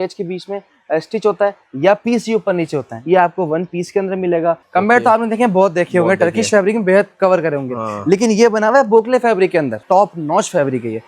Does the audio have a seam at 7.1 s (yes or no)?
no